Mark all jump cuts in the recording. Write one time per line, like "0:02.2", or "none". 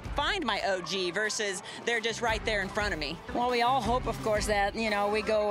0:03.2